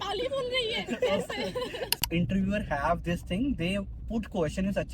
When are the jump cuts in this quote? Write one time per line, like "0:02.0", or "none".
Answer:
0:01.9